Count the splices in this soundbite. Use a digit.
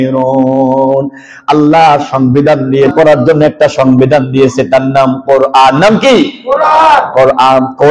1